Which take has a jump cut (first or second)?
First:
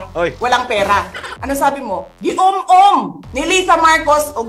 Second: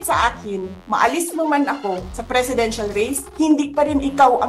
first